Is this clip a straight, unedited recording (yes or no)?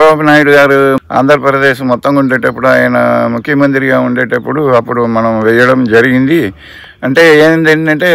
no